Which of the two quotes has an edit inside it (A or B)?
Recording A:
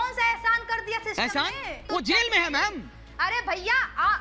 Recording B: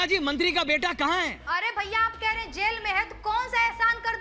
A